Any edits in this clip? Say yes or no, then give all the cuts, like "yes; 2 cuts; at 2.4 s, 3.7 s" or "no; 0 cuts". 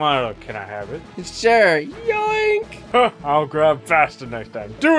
yes; 2 cuts; at 1.2 s, 2.8 s